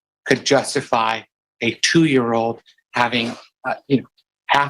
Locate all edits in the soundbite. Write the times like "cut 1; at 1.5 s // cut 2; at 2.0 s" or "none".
cut 1; at 3.5 s

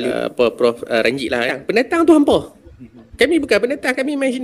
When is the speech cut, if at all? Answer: cut 1; at 1.6 s

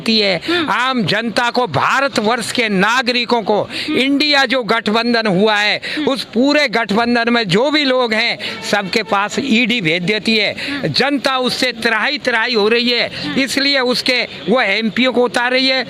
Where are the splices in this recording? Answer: none

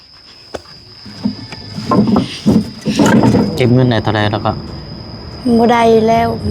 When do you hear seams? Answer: cut 1; at 3.5 s

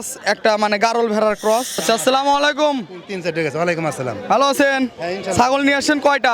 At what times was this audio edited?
cut 1; at 1.8 s

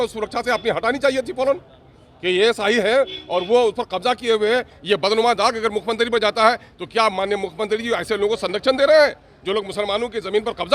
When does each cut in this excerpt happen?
none

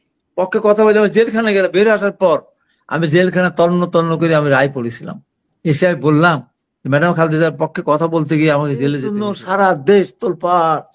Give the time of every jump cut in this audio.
cut 1; at 9.2 s

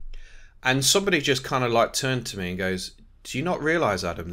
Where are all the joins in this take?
none

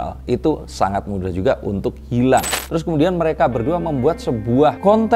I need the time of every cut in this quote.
cut 1; at 2.5 s

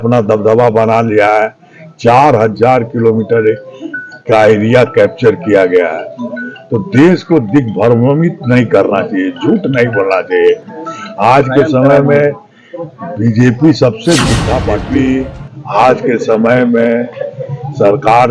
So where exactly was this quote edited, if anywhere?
cut 1; at 14.7 s

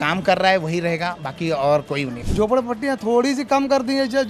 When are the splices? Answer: cut 1; at 2.2 s

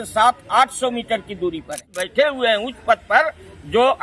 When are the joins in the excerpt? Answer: cut 1; at 2.0 s

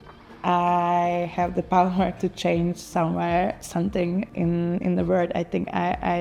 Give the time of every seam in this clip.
none

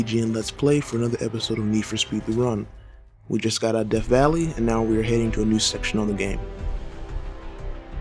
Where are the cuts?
cut 1; at 3.1 s

